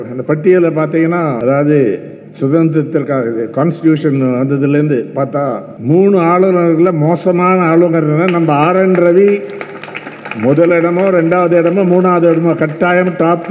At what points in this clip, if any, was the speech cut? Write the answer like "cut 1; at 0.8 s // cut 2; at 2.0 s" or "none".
cut 1; at 1.4 s // cut 2; at 5.7 s